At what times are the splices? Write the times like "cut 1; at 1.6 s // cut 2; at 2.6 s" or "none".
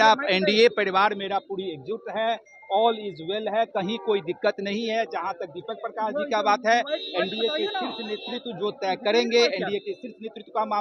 none